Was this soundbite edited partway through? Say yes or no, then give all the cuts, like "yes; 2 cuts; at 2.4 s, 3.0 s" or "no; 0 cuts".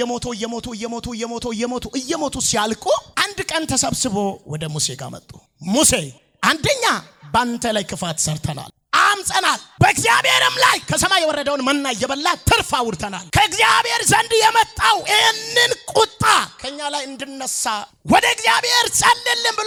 no; 0 cuts